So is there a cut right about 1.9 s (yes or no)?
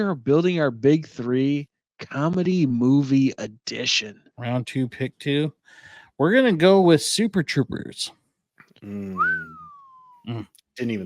no